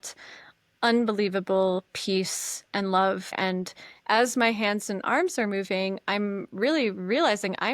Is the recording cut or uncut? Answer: cut